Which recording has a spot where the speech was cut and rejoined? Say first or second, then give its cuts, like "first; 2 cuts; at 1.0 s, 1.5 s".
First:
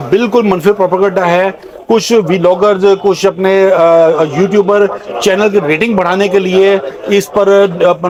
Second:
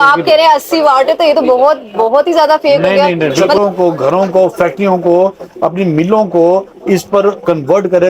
second; 1 cut; at 3.6 s